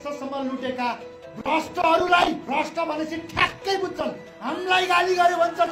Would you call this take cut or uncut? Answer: cut